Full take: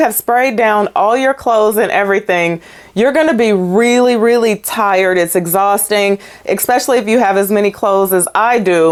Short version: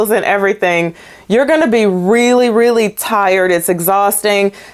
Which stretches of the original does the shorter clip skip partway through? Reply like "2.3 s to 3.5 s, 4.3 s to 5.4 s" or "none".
none